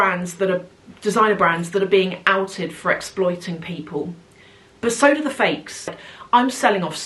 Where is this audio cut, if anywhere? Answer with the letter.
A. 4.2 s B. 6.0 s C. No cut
B